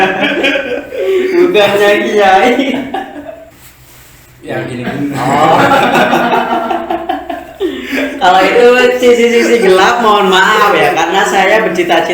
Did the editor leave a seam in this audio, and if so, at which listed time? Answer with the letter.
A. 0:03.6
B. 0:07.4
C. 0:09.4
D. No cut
A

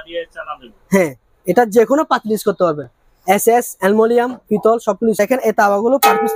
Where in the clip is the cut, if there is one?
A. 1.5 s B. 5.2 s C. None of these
B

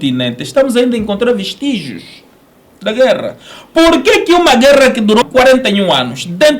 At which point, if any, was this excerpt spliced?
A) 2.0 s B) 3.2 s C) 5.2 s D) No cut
C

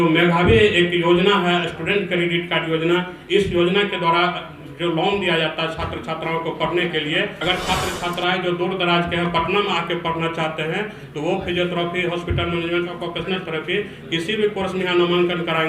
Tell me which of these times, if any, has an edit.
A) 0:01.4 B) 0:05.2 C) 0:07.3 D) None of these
C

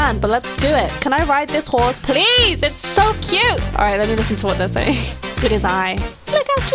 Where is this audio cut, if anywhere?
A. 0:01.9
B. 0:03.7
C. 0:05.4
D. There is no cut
B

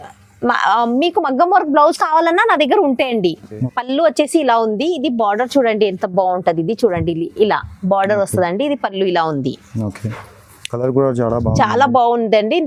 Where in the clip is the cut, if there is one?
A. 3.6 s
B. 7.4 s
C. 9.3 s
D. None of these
A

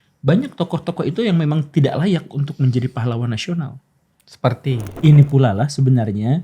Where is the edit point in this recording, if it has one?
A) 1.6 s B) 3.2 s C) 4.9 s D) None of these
C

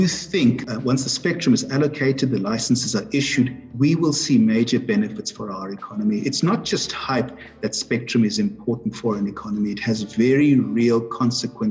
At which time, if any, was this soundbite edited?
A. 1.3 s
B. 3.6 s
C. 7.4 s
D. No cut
B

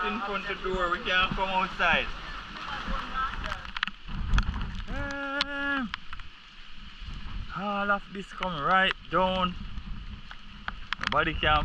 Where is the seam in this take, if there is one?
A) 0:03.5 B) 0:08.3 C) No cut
A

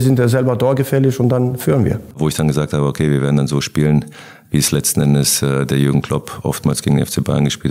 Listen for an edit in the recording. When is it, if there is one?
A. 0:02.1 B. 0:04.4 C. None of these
A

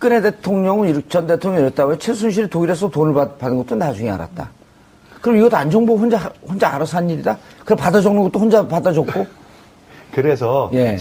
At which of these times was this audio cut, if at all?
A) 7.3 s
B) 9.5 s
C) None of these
C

